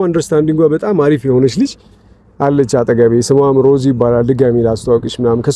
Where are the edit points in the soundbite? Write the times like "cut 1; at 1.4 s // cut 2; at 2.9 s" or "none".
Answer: none